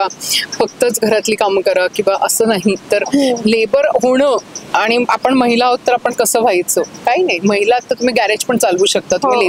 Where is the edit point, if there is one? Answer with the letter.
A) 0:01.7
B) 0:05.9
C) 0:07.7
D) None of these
D